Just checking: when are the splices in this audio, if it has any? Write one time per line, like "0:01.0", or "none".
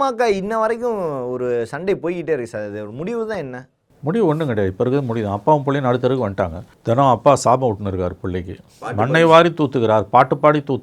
0:06.7